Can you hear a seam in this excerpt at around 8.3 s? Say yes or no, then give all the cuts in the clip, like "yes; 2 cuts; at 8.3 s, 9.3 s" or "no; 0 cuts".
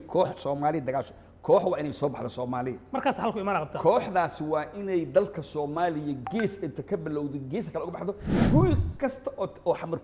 yes; 1 cut; at 8.3 s